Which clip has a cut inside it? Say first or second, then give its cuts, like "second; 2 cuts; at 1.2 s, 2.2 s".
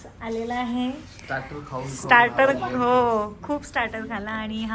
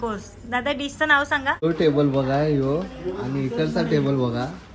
second; 1 cut; at 1.6 s